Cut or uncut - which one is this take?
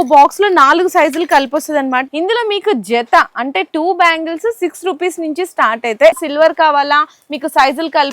cut